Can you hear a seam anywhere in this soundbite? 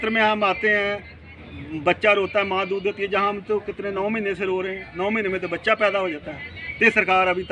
no; 0 cuts

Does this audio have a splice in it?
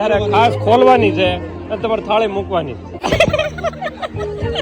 yes; 1 cut; at 3.0 s

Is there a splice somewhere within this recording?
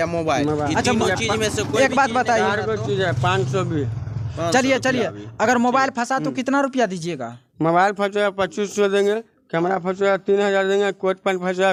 no; 0 cuts

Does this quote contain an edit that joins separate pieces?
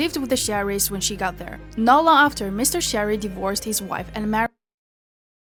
no; 0 cuts

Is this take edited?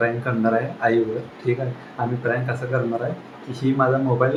no; 0 cuts

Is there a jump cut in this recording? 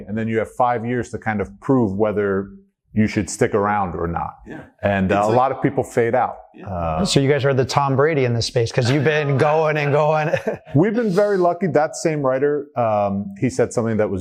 no; 0 cuts

